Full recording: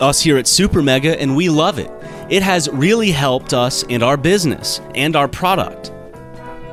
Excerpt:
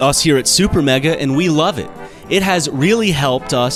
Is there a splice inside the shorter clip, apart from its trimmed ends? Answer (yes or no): no